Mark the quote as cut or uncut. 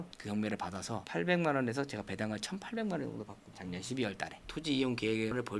cut